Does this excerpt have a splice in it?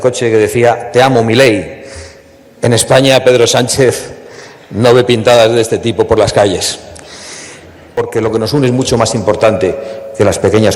yes; 1 cut; at 8.0 s

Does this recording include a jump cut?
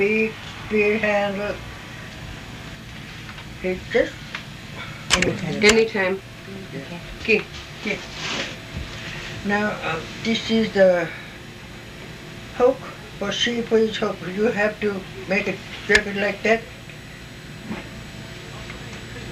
no; 0 cuts

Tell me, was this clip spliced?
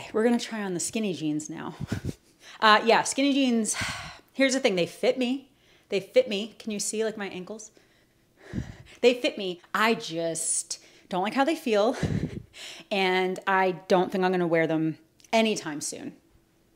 no; 0 cuts

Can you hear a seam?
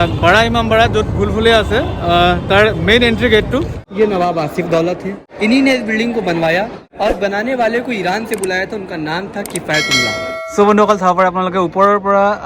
yes; 4 cuts; at 3.8 s, 5.3 s, 6.8 s, 10.3 s

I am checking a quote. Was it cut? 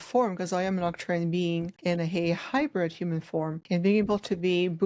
yes; 2 cuts; at 1.7 s, 3.6 s

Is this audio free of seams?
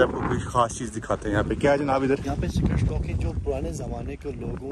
yes; 0 cuts

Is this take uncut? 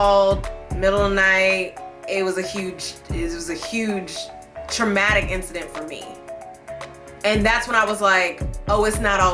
yes; 0 cuts

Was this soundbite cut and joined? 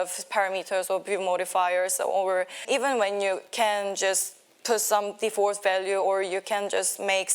yes; 1 cut; at 2.6 s

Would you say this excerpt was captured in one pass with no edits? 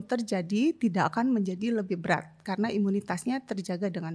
yes; 0 cuts

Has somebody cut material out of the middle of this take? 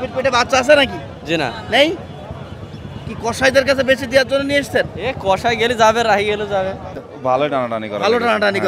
yes; 1 cut; at 6.9 s

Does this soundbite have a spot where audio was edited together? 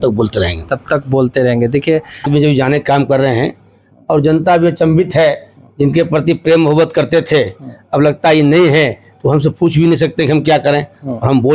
yes; 1 cut; at 2.3 s

